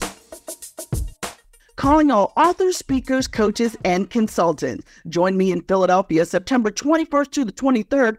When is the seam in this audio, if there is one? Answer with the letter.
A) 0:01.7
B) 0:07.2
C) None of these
A